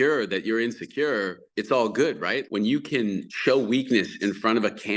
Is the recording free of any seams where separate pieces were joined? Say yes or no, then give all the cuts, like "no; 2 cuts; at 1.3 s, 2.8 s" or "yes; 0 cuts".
no; 3 cuts; at 1.5 s, 2.5 s, 3.3 s